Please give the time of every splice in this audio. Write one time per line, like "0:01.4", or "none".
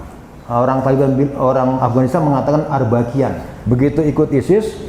0:03.5